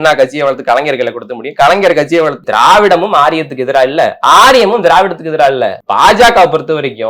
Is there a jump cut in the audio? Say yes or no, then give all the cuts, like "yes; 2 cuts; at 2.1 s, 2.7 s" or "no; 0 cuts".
yes; 2 cuts; at 2.4 s, 5.8 s